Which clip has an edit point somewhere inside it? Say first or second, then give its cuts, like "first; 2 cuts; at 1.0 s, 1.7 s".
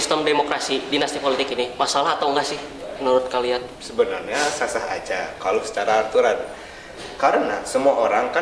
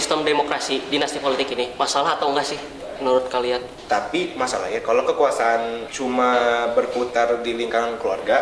second; 2 cuts; at 3.7 s, 5.9 s